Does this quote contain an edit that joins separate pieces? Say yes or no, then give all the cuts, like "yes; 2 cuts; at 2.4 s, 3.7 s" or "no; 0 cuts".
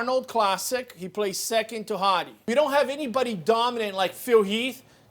yes; 1 cut; at 2.3 s